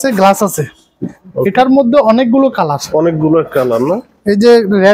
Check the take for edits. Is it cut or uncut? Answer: uncut